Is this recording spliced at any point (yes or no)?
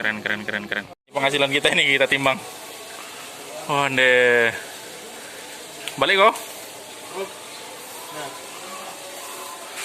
yes